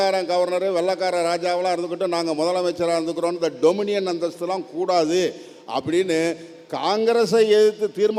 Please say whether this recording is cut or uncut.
uncut